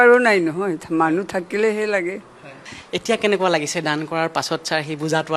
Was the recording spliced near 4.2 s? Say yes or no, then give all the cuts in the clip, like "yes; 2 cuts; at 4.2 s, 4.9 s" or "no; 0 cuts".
no; 1 cut; at 2.5 s